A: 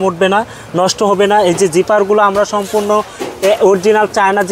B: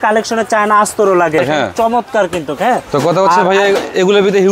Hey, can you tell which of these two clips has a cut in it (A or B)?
B